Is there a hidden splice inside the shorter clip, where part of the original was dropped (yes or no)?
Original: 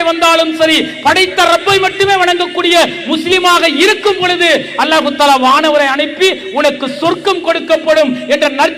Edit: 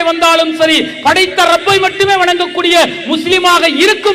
no